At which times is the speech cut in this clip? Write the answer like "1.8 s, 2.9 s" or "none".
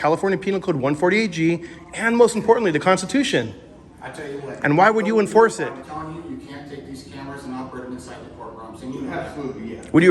5.8 s